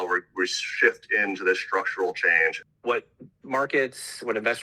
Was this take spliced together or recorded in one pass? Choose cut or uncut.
cut